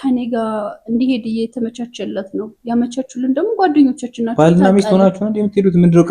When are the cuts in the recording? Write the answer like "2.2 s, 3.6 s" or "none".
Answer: none